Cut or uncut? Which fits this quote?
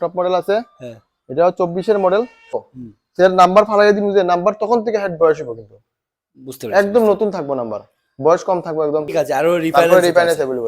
cut